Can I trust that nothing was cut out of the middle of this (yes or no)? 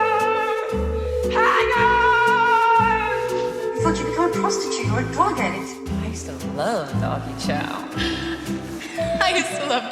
yes